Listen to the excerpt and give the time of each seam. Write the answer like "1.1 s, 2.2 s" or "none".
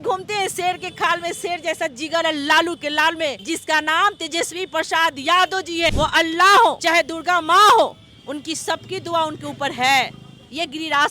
3.4 s, 5.9 s, 6.8 s